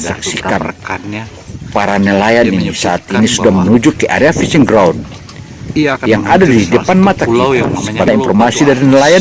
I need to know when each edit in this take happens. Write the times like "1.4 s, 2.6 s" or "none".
8.1 s